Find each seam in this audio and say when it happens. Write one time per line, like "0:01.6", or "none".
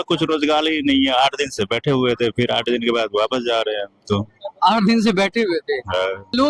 none

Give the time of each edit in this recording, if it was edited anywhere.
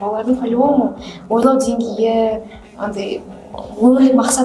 none

